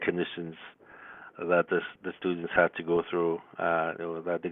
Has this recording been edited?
no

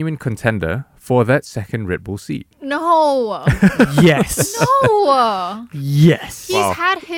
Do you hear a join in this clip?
no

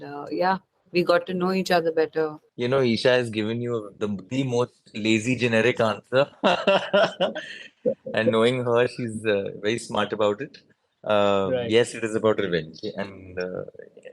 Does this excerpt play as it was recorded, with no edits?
no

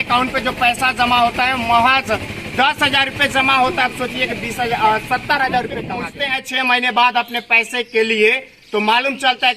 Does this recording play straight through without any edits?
no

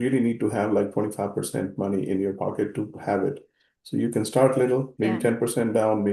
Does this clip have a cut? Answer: yes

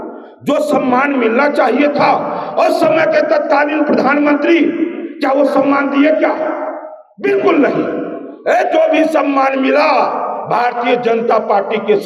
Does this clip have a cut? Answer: no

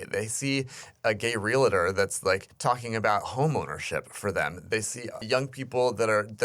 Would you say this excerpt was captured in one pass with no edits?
no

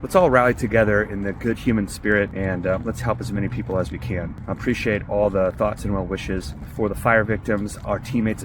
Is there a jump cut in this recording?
yes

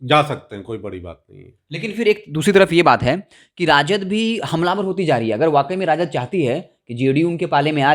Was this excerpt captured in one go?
yes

